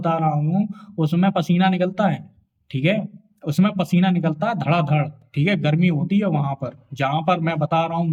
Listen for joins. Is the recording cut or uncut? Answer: uncut